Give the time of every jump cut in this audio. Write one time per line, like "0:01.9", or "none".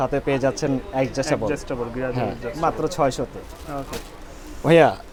none